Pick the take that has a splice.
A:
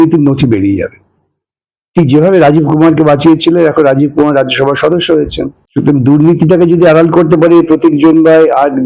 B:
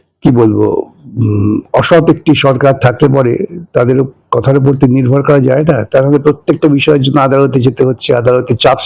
A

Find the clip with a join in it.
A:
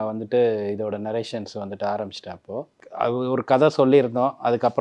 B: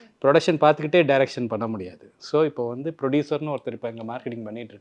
A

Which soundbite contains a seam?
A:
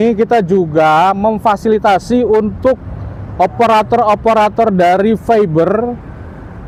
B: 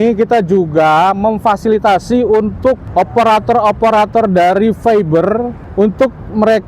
B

